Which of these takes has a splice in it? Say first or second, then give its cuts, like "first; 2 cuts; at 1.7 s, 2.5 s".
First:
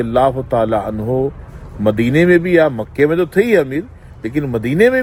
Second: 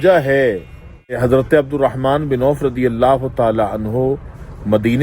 second; 1 cut; at 1.2 s